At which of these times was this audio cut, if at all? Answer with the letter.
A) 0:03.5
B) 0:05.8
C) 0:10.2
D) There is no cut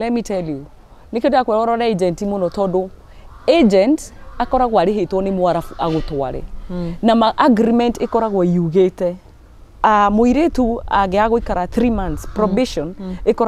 D